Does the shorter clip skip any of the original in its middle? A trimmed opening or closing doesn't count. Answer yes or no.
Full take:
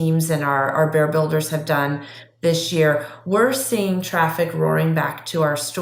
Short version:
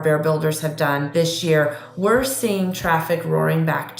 yes